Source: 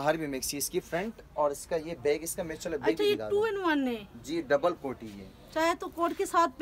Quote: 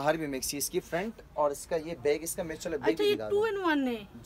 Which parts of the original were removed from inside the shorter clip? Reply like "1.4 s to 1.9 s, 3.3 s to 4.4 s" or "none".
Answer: none